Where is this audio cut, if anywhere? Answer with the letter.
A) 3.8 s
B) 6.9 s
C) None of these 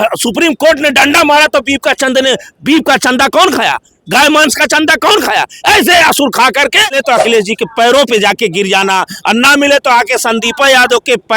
B